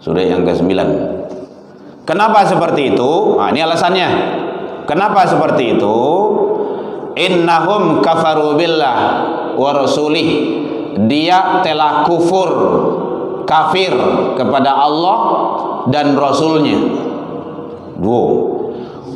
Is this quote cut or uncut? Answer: uncut